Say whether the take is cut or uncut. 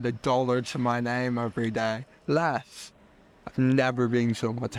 uncut